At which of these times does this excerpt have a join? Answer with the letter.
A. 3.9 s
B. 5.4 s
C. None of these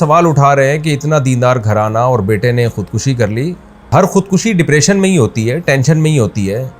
A